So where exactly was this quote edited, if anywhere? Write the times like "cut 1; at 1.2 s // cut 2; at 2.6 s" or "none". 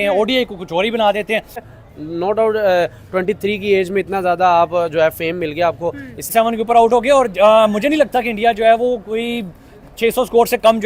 cut 1; at 1.6 s // cut 2; at 6.2 s

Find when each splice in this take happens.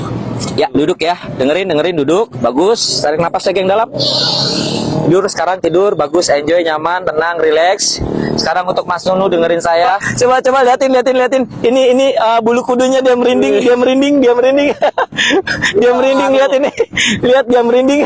cut 1; at 10.0 s // cut 2; at 15.7 s

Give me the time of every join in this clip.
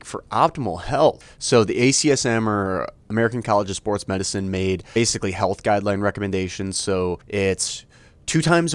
cut 1; at 1.2 s // cut 2; at 4.9 s // cut 3; at 7.2 s

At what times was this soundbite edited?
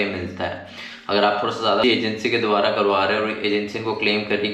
cut 1; at 1.8 s

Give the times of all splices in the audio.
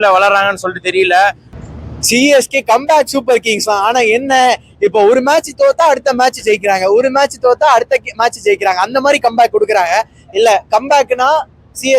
cut 1; at 1.5 s

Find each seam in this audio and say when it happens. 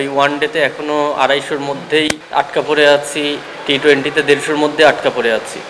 cut 1; at 2.2 s

